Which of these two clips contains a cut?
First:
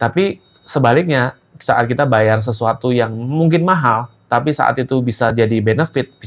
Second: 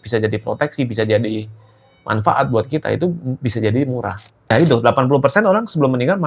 second; 1 cut; at 4.5 s

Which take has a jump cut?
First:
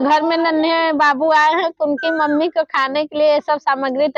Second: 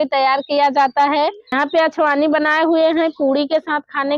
second; 1 cut; at 1.5 s

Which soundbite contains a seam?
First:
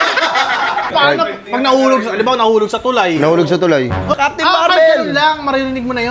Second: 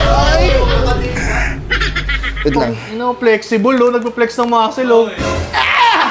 first; 2 cuts; at 0.9 s, 4.2 s

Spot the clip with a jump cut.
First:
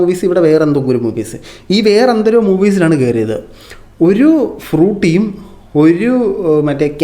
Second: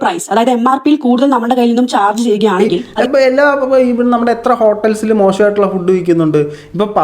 second; 1 cut; at 2.9 s

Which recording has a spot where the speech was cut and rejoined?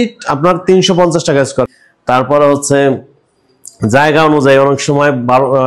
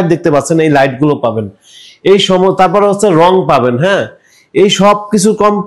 first; 1 cut; at 1.8 s

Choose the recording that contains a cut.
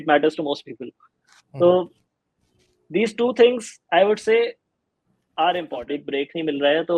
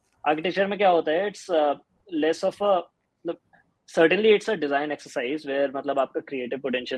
first; 1 cut; at 6.0 s

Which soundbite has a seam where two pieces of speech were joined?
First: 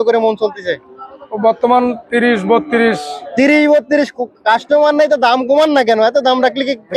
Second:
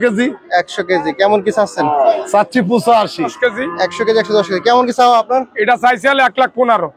second; 1 cut; at 3.3 s

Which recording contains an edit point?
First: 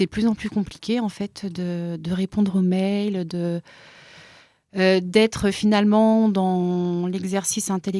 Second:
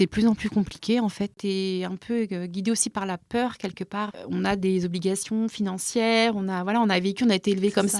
second; 2 cuts; at 1.4 s, 4.1 s

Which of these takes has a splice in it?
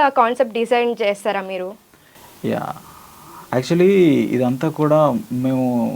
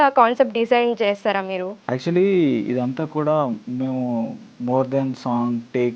second; 2 cuts; at 1.7 s, 4.5 s

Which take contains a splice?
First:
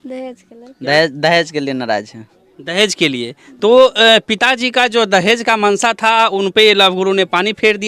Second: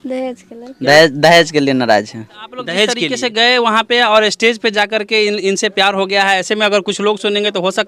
second; 1 cut; at 3.0 s

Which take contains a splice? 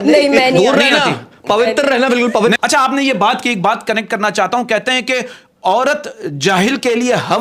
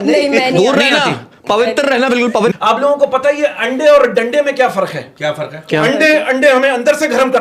second; 1 cut; at 2.6 s

